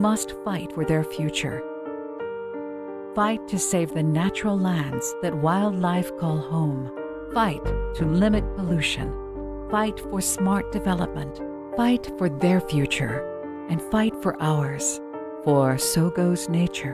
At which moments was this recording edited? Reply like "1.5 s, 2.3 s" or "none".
12.6 s